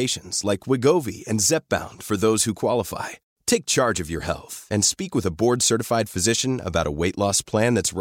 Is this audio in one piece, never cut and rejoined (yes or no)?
yes